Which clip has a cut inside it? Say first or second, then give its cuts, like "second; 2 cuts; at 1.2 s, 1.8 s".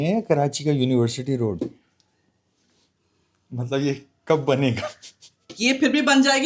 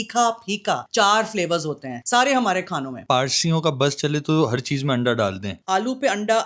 second; 4 cuts; at 0.8 s, 1.9 s, 3.0 s, 5.5 s